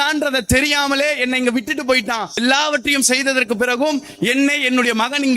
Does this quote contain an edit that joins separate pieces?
yes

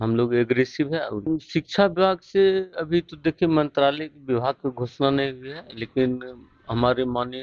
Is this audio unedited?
no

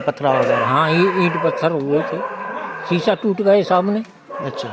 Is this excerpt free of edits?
yes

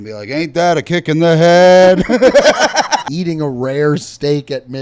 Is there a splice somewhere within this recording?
yes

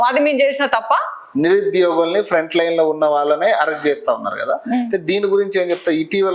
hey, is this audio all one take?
no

